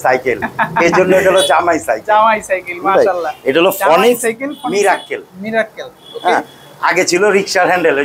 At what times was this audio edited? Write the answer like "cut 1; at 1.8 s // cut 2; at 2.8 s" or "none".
none

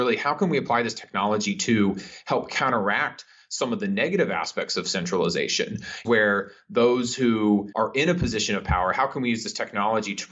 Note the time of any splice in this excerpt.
cut 1; at 6.0 s // cut 2; at 7.7 s

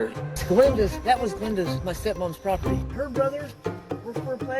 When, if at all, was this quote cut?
none

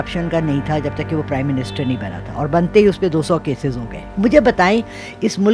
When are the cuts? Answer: cut 1; at 4.1 s

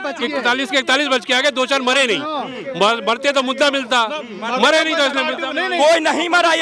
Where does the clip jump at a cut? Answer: none

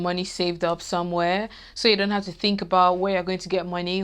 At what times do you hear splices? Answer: none

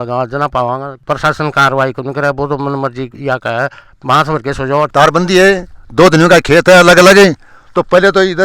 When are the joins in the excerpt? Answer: cut 1; at 4.9 s

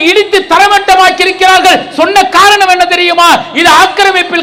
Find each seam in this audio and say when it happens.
none

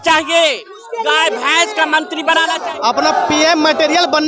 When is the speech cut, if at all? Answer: cut 1; at 2.6 s

